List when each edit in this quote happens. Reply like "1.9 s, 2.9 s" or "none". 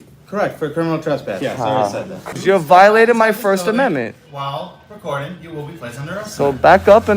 2.2 s